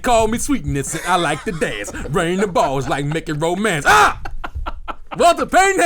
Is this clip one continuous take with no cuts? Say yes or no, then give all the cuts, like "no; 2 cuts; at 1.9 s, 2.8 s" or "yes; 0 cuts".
yes; 0 cuts